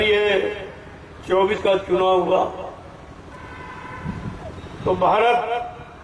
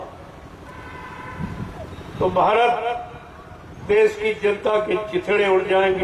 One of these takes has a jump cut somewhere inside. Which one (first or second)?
first